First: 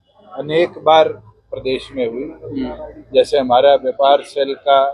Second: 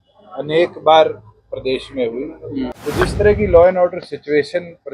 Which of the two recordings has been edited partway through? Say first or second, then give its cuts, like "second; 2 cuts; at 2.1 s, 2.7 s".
second; 1 cut; at 2.8 s